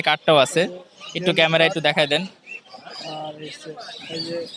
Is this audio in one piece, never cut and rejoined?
yes; 0 cuts

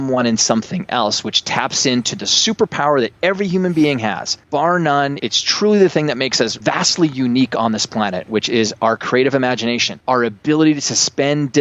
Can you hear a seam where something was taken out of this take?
yes; 4 cuts; at 4.3 s, 5.2 s, 6.6 s, 9.9 s

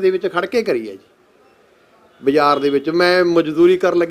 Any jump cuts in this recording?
no; 0 cuts

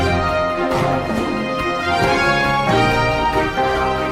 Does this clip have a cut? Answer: no; 0 cuts

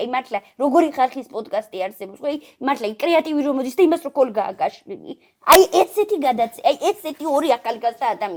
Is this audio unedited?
yes; 0 cuts

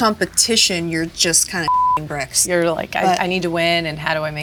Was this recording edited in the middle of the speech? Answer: no; 0 cuts

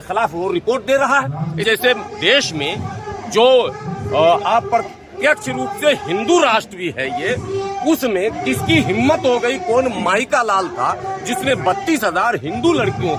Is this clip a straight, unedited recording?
no; 1 cut; at 1.6 s

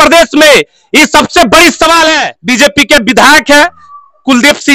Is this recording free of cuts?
no; 1 cut; at 2.3 s

